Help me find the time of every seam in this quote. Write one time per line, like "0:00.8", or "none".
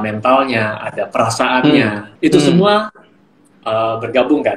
0:02.0